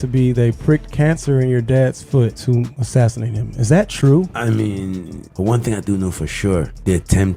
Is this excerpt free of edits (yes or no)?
no